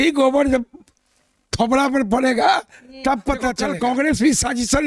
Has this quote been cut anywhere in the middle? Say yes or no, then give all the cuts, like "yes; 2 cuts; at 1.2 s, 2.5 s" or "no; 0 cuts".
yes; 1 cut; at 3.6 s